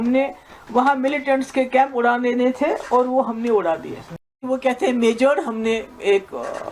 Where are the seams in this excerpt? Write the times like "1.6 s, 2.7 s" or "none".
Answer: 4.4 s